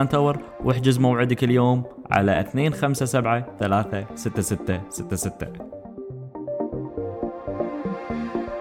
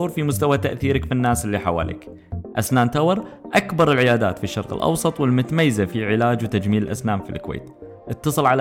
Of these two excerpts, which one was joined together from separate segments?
first; 1 cut; at 5.5 s

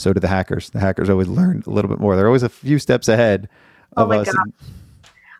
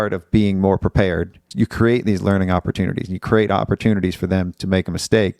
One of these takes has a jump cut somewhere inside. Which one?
second; 1 cut; at 1.4 s

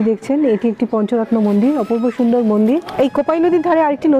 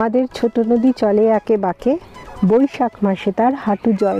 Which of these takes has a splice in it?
first; 1 cut; at 2.9 s

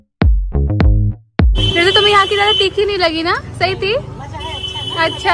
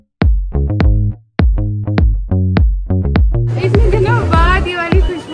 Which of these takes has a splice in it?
first; 1 cut; at 1.5 s

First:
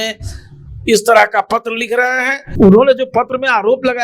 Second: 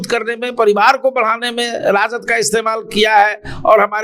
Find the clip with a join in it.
first; 1 cut; at 2.5 s

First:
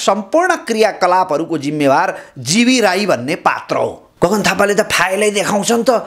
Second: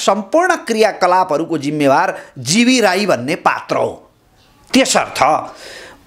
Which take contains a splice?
first; 1 cut; at 4.0 s

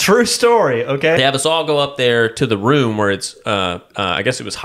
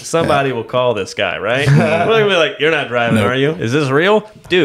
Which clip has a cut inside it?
first; 1 cut; at 1.2 s

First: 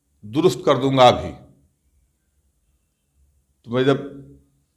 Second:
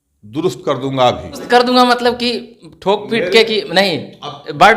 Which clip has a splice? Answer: second; 1 cut; at 1.4 s

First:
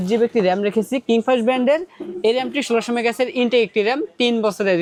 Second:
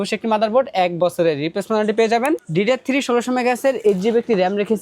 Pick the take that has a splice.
second; 1 cut; at 2.5 s

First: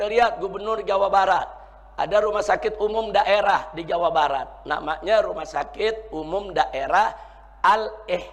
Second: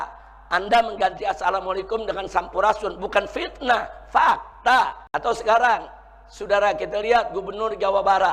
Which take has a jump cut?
second; 1 cut; at 5.0 s

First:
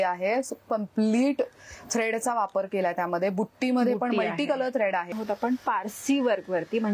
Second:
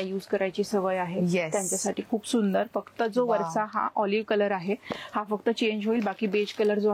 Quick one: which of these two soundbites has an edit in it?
first; 1 cut; at 5.2 s

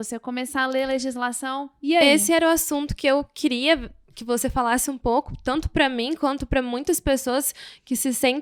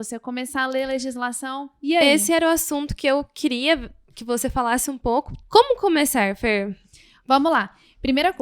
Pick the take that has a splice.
second; 1 cut; at 5.4 s

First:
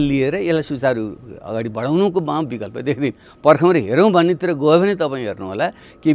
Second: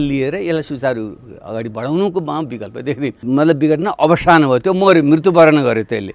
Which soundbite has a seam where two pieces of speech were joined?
second; 1 cut; at 3.2 s

